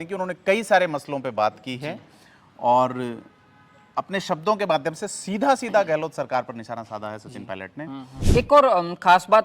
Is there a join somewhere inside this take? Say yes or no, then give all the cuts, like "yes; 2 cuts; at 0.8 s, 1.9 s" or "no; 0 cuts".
yes; 1 cut; at 8.3 s